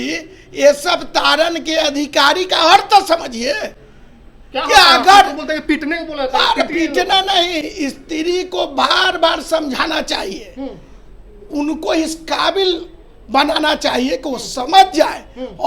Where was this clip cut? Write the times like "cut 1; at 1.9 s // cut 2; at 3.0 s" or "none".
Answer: none